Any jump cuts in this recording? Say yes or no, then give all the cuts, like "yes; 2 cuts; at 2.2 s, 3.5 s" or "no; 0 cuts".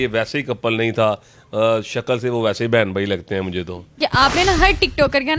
yes; 1 cut; at 4.0 s